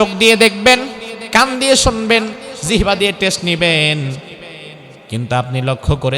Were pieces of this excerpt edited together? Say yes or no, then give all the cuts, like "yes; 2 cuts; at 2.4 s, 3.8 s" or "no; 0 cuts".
no; 0 cuts